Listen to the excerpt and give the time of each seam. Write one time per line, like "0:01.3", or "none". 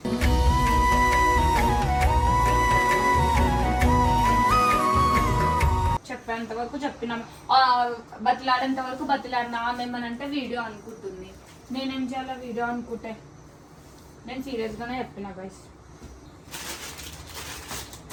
none